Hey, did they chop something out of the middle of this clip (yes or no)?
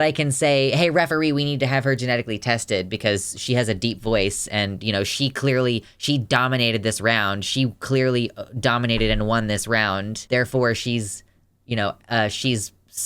yes